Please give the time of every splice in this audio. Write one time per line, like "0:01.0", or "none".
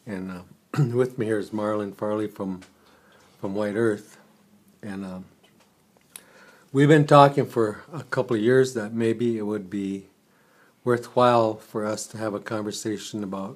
none